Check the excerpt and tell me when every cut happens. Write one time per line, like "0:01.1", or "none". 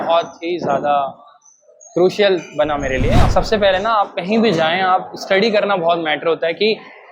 0:03.2